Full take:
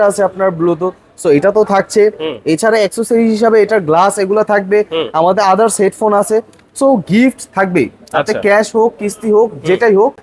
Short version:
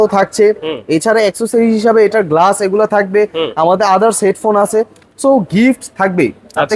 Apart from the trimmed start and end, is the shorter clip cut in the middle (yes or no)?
no